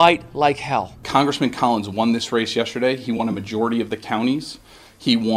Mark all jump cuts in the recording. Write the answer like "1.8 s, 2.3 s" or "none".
1.0 s